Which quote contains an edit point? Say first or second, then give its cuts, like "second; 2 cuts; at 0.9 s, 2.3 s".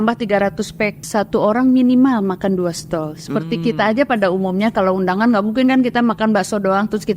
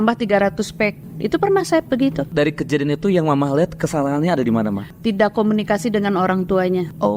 first; 1 cut; at 1.1 s